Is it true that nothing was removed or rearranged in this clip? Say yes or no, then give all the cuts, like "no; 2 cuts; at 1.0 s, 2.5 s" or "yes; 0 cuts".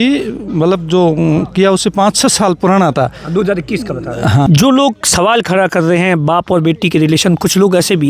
no; 1 cut; at 4.5 s